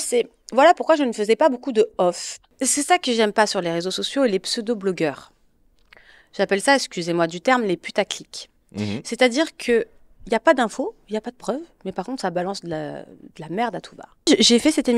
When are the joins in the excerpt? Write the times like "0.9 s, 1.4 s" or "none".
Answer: 2.6 s, 14.3 s